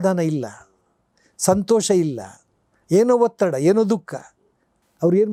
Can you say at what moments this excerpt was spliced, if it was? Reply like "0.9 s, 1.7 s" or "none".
none